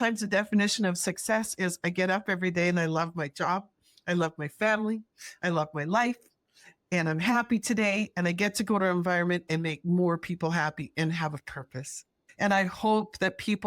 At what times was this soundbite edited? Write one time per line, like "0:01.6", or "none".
0:12.2